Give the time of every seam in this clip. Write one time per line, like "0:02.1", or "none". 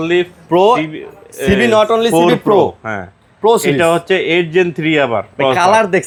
none